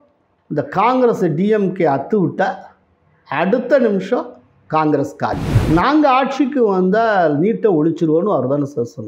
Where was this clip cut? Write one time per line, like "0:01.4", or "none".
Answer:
0:05.5